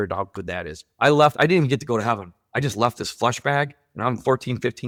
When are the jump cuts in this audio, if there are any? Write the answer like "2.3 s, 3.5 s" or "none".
none